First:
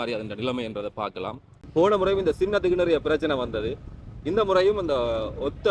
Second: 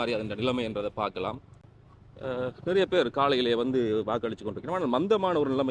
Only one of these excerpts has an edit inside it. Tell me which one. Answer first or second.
first